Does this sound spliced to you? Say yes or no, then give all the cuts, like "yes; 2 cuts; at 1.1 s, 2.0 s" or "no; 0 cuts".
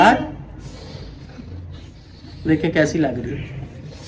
no; 0 cuts